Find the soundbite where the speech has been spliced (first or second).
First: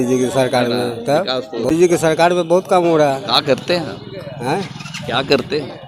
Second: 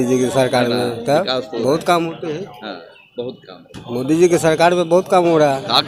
first